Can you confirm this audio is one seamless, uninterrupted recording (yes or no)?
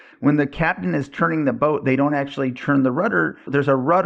yes